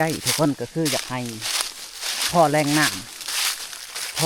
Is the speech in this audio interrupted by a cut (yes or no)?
no